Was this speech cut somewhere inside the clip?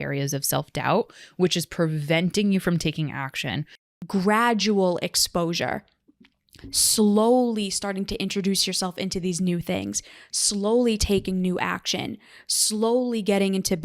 yes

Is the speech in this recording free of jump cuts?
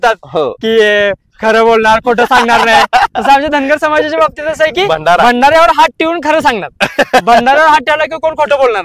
yes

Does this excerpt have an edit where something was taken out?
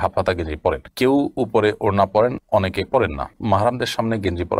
no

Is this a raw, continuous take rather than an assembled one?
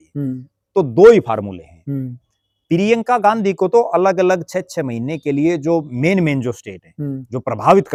yes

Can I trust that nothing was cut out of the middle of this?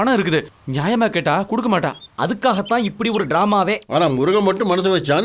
no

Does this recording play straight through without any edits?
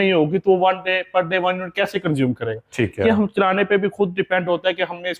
yes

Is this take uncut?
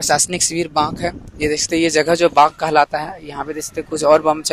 yes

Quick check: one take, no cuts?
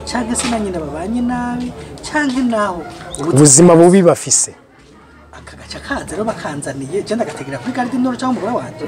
yes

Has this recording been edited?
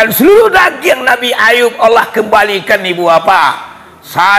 no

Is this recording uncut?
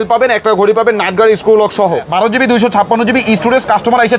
no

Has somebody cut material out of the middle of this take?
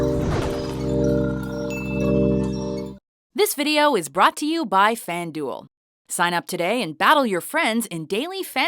yes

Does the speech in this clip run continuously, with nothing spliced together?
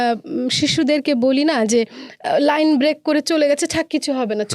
yes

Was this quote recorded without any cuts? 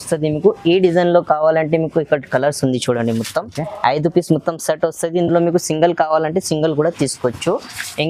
yes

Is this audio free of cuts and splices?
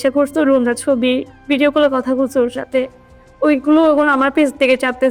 yes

